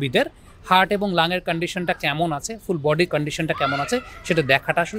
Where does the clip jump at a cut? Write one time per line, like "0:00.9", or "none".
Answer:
none